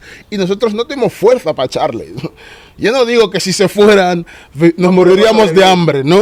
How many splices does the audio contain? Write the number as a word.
zero